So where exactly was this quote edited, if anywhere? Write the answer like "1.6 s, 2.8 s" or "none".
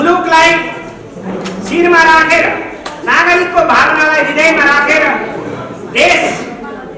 none